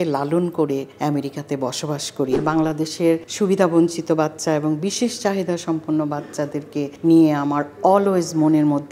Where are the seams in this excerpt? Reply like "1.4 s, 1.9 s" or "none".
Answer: 0.9 s, 2.4 s, 3.3 s, 6.9 s